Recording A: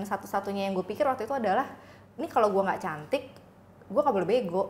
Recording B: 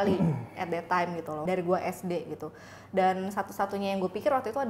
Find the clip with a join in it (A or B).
B